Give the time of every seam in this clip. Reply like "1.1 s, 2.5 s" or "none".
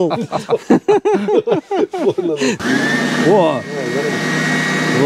2.6 s